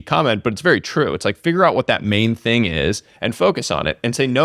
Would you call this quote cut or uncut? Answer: uncut